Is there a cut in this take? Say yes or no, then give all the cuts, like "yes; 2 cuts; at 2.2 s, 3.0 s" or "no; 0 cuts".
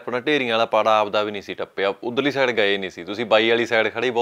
no; 0 cuts